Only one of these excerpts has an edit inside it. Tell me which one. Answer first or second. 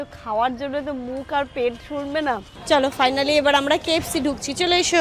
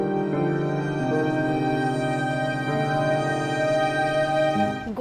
first